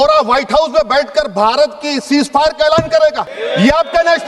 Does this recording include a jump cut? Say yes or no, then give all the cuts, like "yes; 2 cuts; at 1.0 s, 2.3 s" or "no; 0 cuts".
yes; 1 cut; at 3.3 s